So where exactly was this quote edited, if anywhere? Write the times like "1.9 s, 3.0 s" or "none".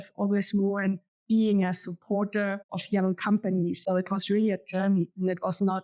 3.8 s